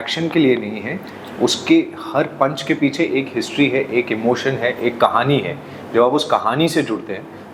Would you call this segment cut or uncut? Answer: uncut